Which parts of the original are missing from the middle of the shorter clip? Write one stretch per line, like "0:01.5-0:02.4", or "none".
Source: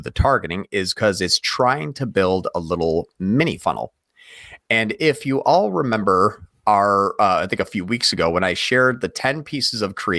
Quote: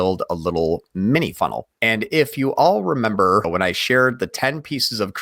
0:03.9-0:04.6
0:06.4-0:08.3